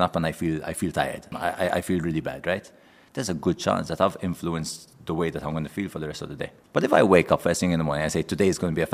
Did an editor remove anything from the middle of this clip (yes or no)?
yes